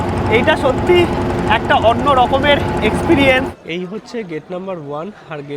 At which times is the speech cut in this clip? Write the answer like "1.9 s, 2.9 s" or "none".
3.9 s